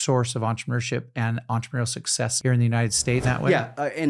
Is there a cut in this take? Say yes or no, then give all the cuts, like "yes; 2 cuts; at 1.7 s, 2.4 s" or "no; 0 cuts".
yes; 2 cuts; at 2.3 s, 3.2 s